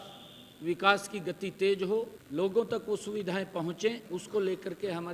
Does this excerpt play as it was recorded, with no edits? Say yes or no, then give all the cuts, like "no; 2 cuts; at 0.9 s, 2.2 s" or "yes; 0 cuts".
no; 2 cuts; at 2.2 s, 4.0 s